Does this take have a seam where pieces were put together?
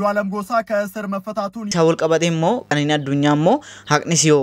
yes; 2 cuts; at 1.7 s, 2.7 s

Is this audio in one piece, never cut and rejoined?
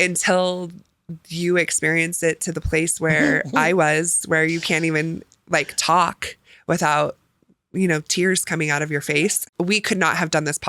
no; 1 cut; at 9.4 s

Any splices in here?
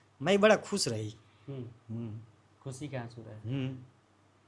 no; 0 cuts

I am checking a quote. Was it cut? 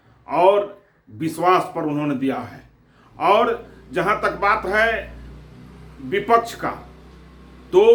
no; 0 cuts

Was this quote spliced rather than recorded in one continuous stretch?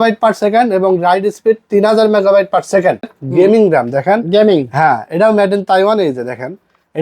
yes; 1 cut; at 3.2 s

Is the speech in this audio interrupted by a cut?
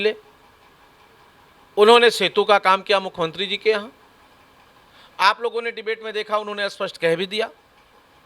no; 0 cuts

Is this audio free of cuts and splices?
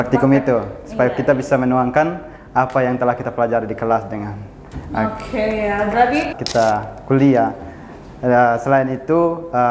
no; 1 cut; at 6.4 s

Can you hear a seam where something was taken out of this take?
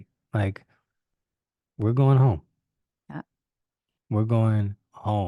no; 0 cuts

